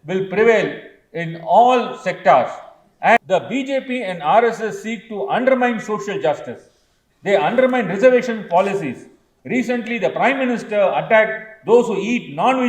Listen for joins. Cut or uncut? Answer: cut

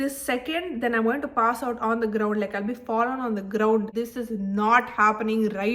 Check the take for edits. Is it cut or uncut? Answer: cut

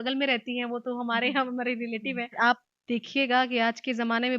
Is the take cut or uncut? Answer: cut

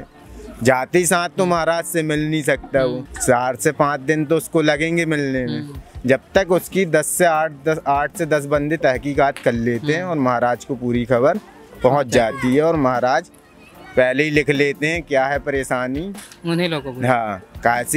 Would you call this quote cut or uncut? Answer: uncut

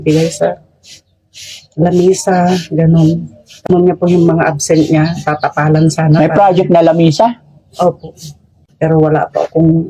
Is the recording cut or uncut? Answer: cut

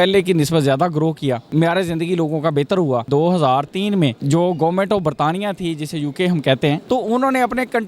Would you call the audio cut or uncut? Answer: cut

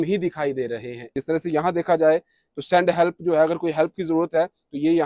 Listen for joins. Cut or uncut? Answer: cut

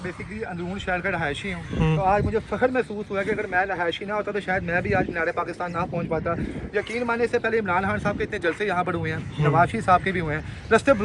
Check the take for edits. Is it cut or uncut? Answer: uncut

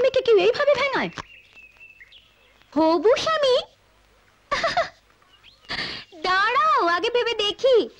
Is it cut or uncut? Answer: uncut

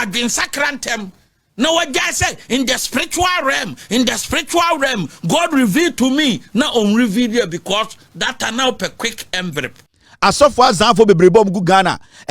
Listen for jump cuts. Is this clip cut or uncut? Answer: cut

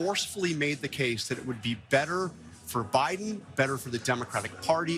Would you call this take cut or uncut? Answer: uncut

